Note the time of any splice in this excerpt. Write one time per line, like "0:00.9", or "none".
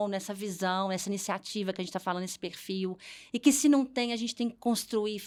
none